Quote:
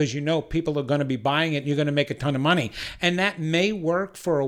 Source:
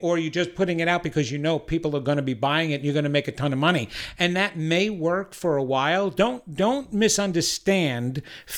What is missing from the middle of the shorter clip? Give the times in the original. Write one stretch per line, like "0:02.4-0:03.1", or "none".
none

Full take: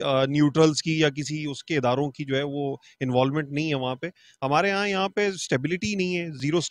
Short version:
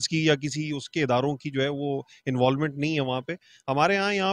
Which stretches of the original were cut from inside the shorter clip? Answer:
none

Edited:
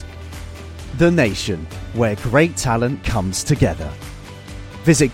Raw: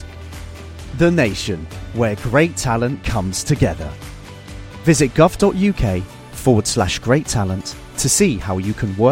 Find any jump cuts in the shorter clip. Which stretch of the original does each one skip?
none

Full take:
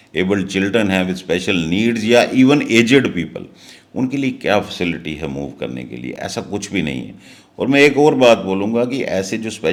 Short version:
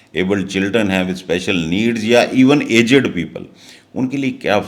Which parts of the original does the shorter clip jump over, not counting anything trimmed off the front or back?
none

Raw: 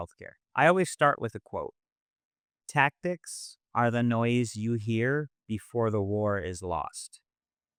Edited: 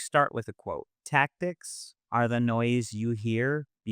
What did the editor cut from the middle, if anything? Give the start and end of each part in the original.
0:01.8-0:02.6

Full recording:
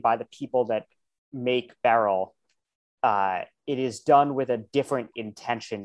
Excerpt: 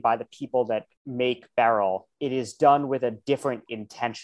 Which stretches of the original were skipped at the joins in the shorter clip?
0:01.0-0:01.2
0:02.4-0:03.6

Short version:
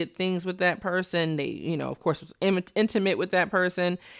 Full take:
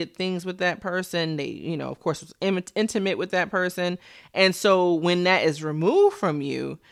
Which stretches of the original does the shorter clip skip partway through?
none

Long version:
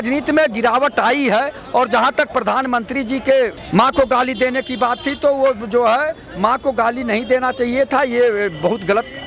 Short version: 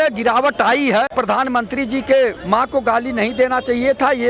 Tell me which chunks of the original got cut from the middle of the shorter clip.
0:01.5-0:02.3
0:03.6-0:06.3

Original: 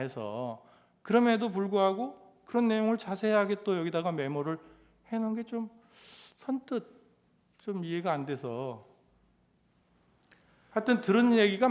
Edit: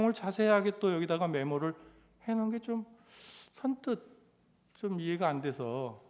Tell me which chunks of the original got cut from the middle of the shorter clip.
none

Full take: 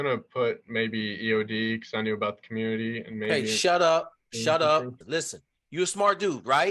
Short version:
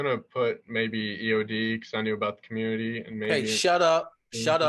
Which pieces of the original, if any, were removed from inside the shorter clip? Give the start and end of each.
none

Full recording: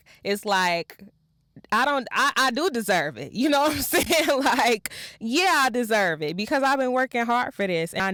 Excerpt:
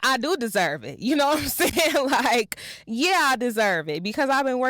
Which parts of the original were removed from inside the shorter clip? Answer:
none

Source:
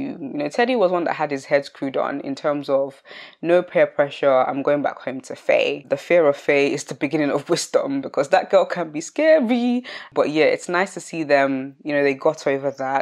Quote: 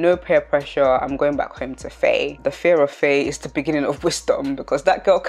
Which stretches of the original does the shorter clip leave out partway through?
none

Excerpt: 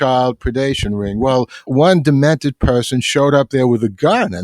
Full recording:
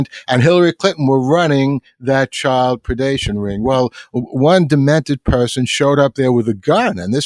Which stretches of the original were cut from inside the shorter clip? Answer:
0:04.1-0:04.3

